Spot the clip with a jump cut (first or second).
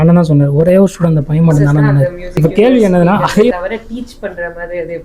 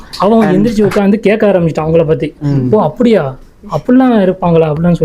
first